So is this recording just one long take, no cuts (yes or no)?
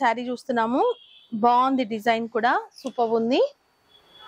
yes